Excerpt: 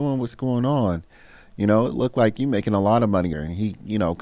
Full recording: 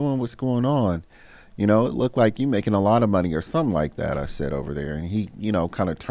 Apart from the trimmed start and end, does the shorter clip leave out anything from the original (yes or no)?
yes